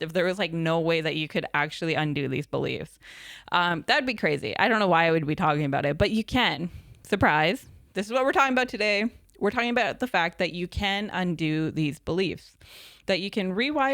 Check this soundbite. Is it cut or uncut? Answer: uncut